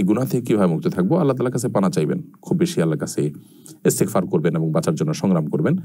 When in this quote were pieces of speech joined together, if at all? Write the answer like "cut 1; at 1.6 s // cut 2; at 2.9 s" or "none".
none